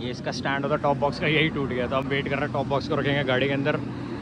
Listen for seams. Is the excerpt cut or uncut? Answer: uncut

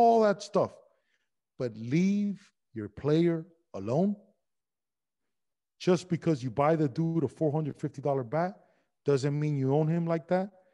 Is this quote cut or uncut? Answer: uncut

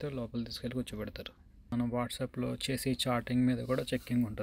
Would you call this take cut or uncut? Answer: cut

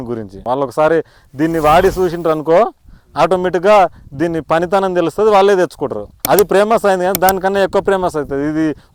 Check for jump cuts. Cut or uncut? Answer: uncut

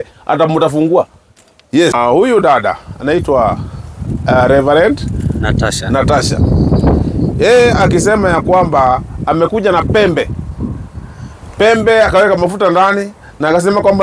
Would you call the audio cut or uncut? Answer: cut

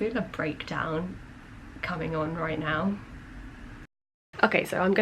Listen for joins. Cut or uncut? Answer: uncut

